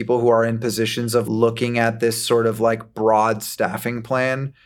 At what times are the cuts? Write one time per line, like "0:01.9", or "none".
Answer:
0:01.3